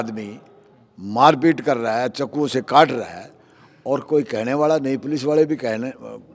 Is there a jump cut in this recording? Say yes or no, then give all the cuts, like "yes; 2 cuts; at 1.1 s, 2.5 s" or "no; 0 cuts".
no; 0 cuts